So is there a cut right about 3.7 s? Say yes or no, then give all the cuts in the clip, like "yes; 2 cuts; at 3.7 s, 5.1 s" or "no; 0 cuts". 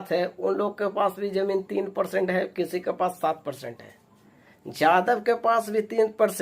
no; 1 cut; at 1.7 s